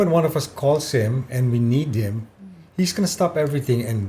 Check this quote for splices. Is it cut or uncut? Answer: uncut